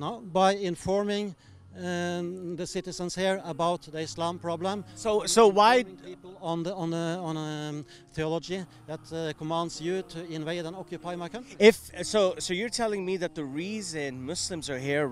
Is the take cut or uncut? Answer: uncut